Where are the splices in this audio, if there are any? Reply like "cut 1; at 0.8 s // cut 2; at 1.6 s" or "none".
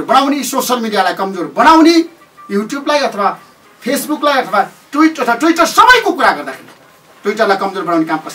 none